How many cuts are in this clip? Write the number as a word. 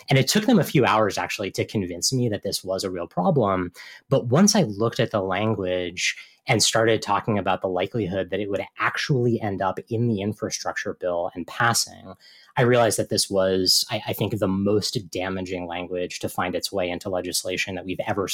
zero